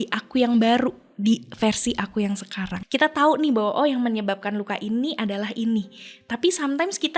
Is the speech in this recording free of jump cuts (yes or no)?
no